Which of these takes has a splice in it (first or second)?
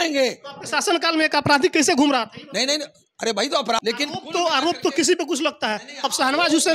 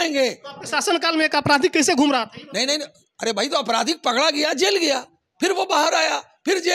first